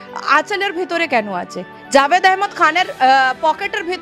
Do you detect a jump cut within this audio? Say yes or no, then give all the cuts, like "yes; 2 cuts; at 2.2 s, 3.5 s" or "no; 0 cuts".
no; 0 cuts